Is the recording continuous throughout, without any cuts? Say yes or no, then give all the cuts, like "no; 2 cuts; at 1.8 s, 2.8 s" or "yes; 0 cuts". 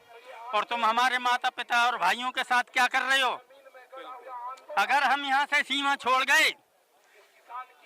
yes; 0 cuts